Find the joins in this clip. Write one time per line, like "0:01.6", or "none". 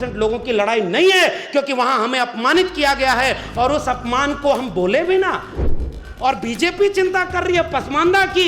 0:05.9